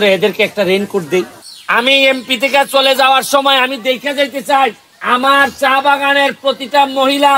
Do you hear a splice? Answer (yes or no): yes